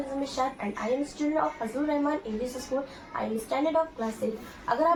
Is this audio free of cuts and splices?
yes; 0 cuts

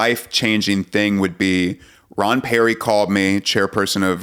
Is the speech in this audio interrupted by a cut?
no; 0 cuts

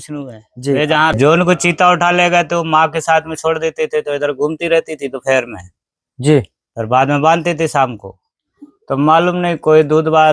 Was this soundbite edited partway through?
yes; 1 cut; at 1.1 s

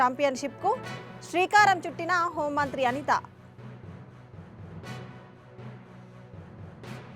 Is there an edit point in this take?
no; 0 cuts

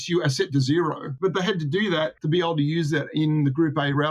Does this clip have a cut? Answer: yes; 2 cuts; at 1.1 s, 2.2 s

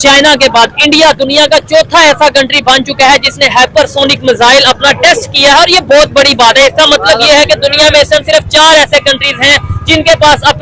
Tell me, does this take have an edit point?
no; 0 cuts

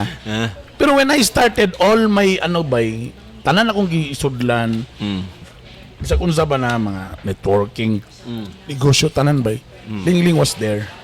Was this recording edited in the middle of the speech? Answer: no; 0 cuts

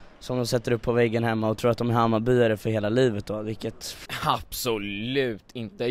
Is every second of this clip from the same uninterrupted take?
no; 1 cut; at 4.0 s

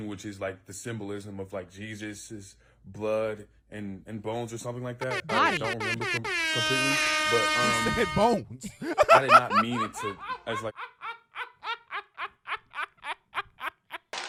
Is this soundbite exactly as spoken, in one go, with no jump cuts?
yes; 0 cuts

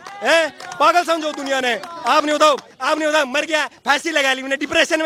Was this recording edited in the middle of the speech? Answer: no; 0 cuts

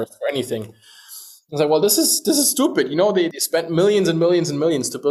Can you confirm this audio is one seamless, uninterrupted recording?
yes; 0 cuts

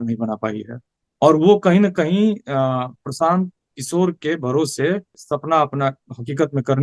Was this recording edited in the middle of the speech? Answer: yes; 1 cut; at 5.2 s

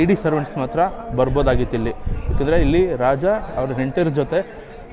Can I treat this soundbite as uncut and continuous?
yes; 0 cuts

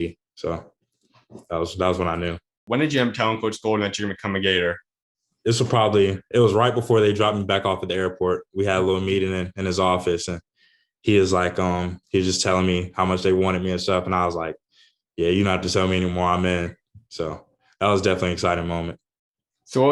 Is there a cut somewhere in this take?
yes; 1 cut; at 2.6 s

